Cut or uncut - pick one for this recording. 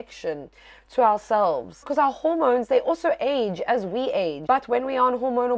cut